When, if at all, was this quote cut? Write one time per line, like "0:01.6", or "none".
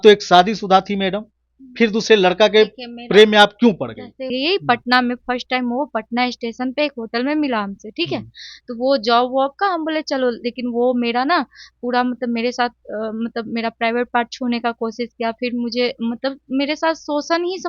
0:04.3